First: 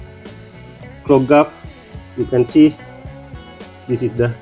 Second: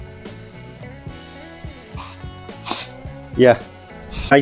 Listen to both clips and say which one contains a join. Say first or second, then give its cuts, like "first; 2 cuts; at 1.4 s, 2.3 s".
first; 1 cut; at 1.1 s